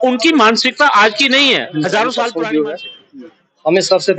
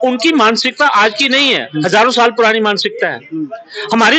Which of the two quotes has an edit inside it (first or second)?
first